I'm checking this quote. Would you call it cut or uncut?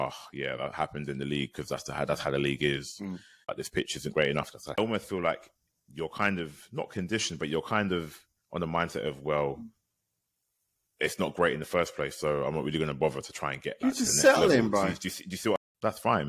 cut